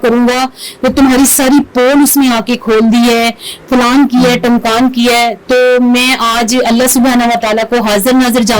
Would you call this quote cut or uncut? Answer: uncut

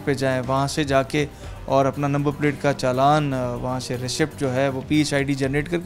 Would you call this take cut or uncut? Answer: uncut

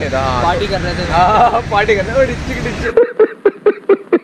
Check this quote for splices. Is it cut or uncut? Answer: cut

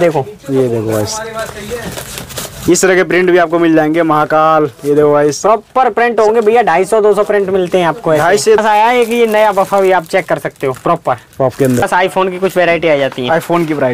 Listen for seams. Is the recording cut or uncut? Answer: cut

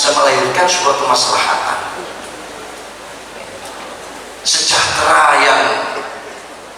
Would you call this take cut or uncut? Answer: uncut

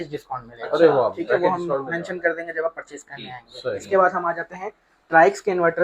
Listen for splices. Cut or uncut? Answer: uncut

